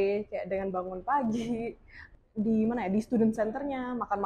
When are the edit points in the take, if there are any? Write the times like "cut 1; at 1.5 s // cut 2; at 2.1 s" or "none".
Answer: cut 1; at 2.0 s